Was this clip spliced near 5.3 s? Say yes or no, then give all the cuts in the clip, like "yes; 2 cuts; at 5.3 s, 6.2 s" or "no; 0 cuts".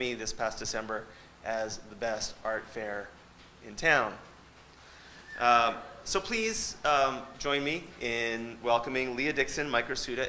no; 1 cut; at 8.1 s